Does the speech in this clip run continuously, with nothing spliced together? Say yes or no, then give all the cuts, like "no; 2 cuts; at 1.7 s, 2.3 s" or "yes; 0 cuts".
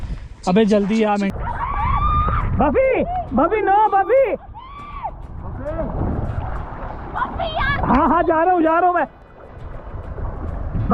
no; 1 cut; at 1.3 s